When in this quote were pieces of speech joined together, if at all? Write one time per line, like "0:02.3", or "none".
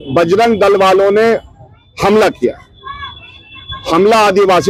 none